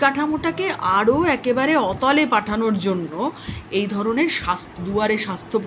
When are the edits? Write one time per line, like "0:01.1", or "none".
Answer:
none